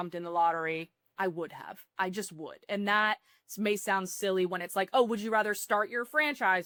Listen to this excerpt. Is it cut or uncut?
uncut